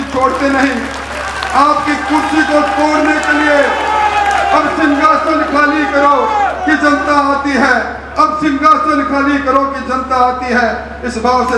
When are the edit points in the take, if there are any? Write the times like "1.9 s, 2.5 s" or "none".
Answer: none